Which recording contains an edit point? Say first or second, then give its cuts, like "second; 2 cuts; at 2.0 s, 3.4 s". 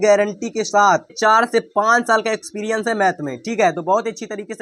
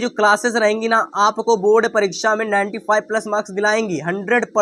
first; 1 cut; at 1.2 s